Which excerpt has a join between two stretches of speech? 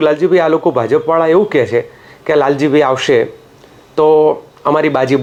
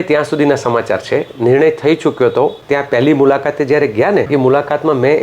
second; 2 cuts; at 2.6 s, 4.3 s

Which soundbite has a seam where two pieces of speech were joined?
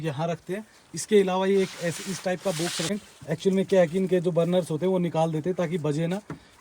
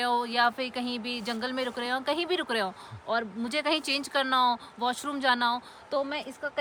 first; 1 cut; at 2.9 s

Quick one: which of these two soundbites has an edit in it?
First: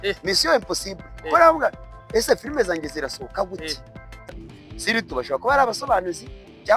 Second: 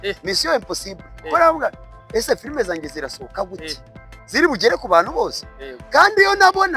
first; 1 cut; at 4.3 s

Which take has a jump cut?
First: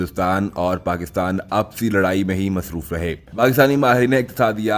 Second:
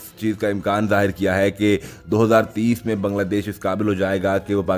first; 1 cut; at 3.3 s

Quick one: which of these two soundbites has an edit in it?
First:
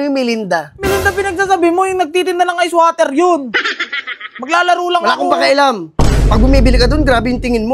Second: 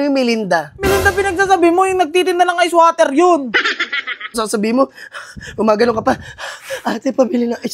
second; 1 cut; at 4.4 s

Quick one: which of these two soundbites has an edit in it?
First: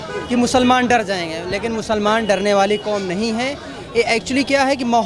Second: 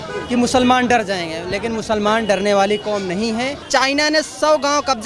second; 1 cut; at 3.6 s

